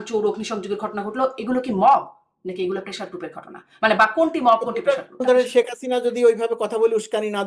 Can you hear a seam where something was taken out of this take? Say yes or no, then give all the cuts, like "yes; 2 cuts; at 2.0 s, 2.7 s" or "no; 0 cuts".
yes; 1 cut; at 5.2 s